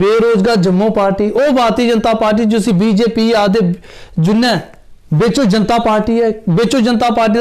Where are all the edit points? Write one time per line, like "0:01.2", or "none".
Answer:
none